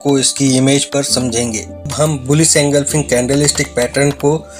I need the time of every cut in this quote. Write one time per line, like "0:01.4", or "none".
0:01.9